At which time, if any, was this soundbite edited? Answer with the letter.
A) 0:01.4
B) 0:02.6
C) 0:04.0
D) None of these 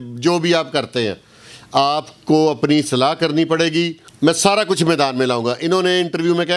C